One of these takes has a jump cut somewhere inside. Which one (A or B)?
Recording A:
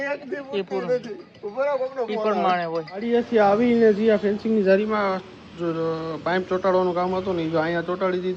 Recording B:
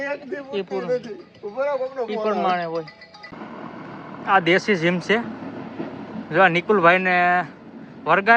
B